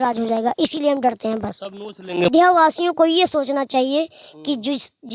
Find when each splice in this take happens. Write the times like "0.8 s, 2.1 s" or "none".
2.3 s